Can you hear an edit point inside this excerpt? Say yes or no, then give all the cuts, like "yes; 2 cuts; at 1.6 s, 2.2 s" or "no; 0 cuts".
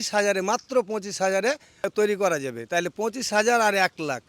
yes; 1 cut; at 1.9 s